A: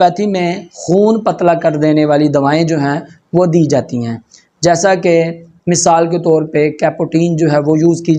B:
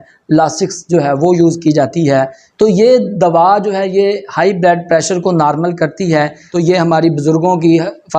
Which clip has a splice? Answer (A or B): B